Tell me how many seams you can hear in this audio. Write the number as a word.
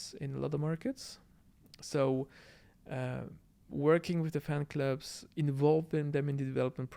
zero